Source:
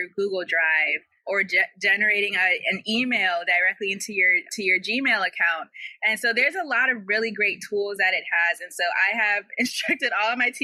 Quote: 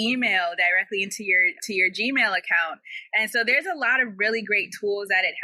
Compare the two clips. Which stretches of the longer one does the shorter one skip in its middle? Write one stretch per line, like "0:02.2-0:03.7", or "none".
none